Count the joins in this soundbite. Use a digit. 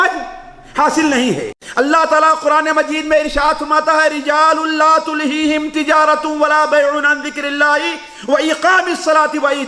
1